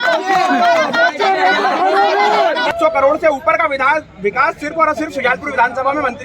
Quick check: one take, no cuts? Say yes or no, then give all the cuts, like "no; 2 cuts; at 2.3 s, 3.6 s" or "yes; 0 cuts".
no; 1 cut; at 2.7 s